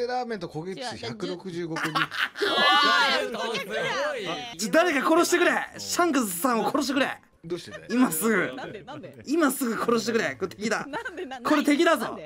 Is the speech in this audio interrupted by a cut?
no; 0 cuts

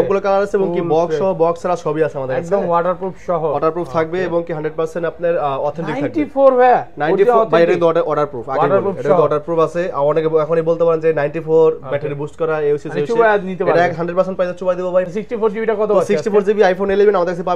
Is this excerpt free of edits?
no; 1 cut; at 15.1 s

